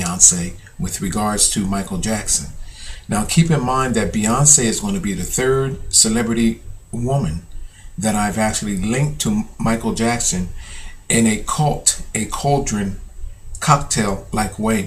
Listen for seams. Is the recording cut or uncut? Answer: cut